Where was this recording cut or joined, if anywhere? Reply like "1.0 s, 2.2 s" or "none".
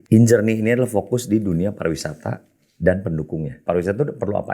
3.6 s